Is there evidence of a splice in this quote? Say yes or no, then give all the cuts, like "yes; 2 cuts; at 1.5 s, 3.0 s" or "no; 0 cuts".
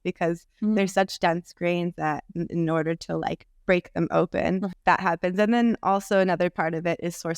yes; 1 cut; at 4.7 s